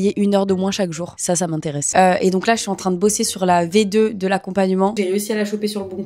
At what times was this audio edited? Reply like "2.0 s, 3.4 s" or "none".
1.9 s, 4.9 s